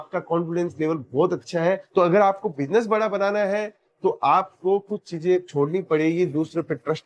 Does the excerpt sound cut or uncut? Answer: cut